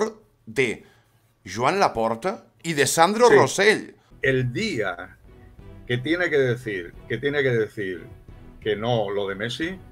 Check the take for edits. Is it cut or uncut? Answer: cut